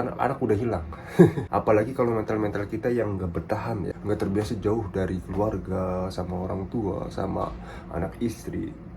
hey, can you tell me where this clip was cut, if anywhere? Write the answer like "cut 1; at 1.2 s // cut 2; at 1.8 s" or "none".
cut 1; at 1.4 s // cut 2; at 3.9 s